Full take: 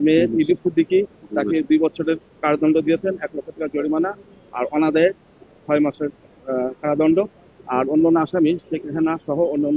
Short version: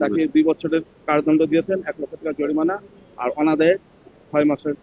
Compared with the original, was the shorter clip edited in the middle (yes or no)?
no